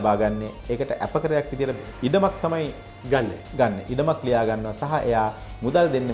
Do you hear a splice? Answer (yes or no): no